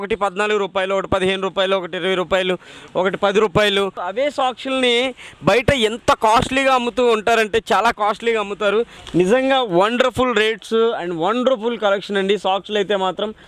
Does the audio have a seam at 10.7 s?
no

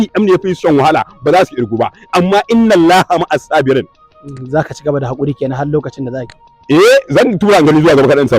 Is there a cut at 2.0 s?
no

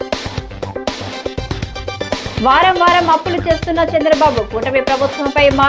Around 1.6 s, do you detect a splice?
no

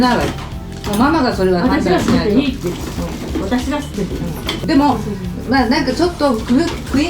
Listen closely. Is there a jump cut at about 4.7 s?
no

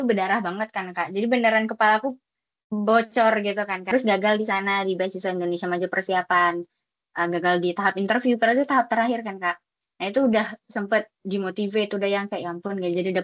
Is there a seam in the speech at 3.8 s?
yes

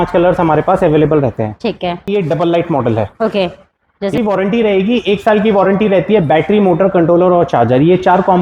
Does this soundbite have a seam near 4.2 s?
yes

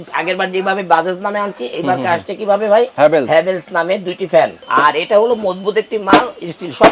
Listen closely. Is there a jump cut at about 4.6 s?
yes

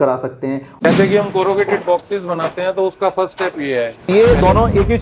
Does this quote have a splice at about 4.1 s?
yes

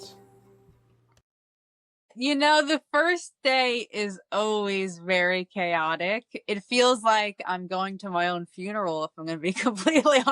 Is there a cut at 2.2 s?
yes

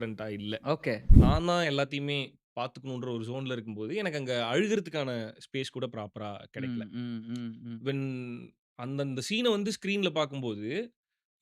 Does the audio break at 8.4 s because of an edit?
no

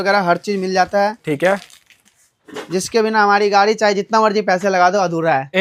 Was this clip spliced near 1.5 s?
no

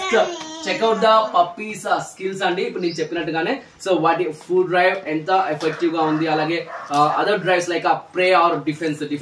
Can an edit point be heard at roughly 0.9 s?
no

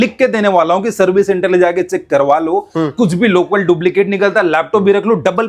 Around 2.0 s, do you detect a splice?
no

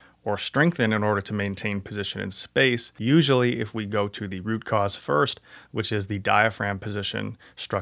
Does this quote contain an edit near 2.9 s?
yes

